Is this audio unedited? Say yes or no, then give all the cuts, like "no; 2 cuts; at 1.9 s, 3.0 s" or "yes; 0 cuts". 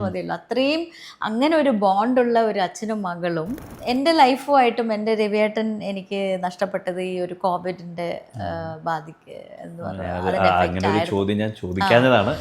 no; 1 cut; at 3.7 s